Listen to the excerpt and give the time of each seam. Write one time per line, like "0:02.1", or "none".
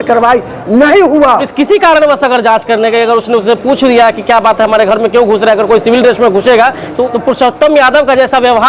0:01.5
0:07.0

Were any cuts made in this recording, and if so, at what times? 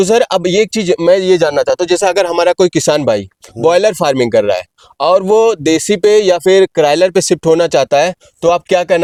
none

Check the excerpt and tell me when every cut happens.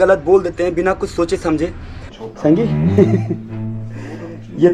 0:02.1

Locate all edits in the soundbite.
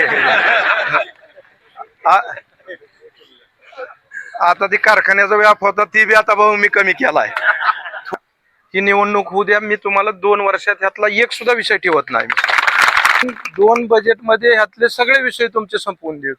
0:08.1
0:13.2

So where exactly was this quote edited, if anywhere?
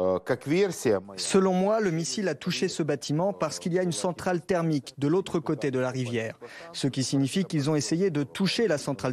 0:01.1

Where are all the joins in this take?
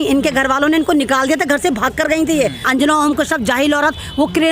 0:02.6

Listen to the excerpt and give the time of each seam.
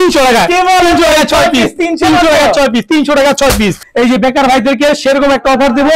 0:03.8

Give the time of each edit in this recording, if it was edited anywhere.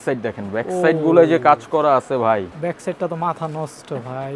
none

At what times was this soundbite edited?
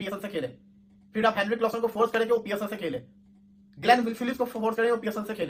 none

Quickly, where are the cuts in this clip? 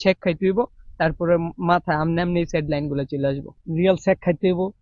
0:03.6

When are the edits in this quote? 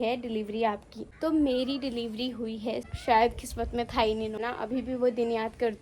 0:01.0
0:02.9
0:04.4

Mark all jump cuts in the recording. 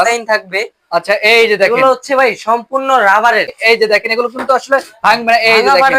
0:03.6

